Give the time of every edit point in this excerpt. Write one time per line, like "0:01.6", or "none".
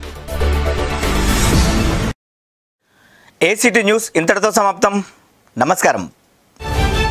none

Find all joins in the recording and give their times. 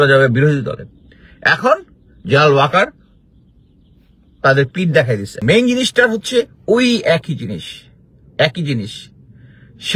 0:05.4

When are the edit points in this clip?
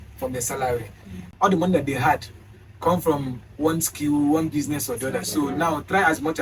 0:01.3

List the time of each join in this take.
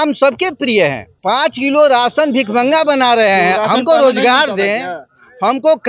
0:01.1

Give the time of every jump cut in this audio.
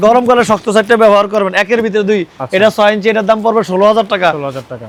none

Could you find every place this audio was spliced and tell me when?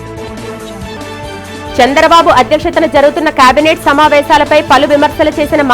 0:00.9

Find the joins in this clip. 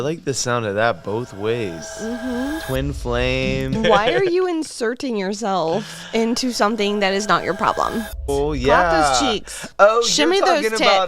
0:03.8
0:08.3

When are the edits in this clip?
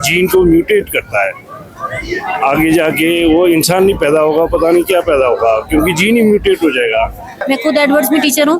0:07.4

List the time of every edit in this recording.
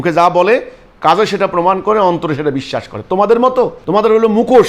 0:03.8

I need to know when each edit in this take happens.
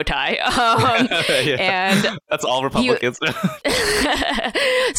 0:02.4
0:03.6

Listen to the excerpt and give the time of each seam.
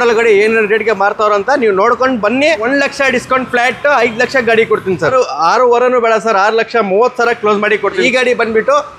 0:02.6
0:05.1
0:08.1

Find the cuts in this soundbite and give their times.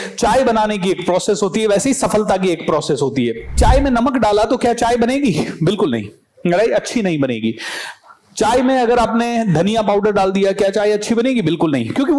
0:03.6

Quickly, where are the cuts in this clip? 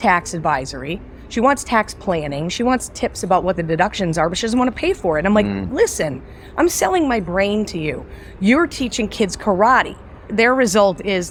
none

